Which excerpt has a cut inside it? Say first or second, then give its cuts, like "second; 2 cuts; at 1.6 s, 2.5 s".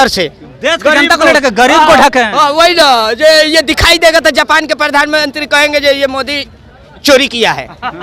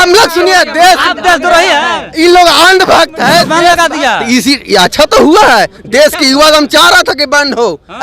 second; 1 cut; at 3.6 s